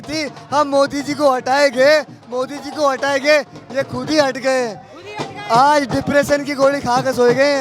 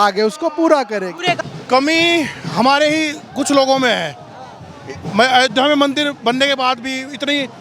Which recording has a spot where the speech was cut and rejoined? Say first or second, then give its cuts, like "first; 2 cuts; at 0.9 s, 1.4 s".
second; 1 cut; at 1.4 s